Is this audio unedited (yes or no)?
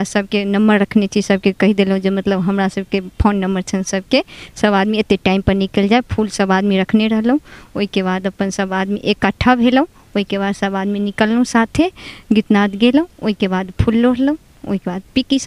yes